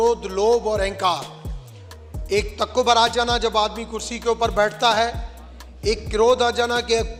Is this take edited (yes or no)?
no